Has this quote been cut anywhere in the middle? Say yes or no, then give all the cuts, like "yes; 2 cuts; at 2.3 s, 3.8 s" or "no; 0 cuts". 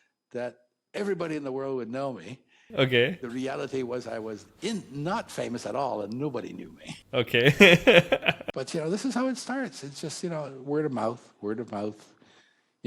yes; 4 cuts; at 2.1 s, 3.2 s, 7.0 s, 8.4 s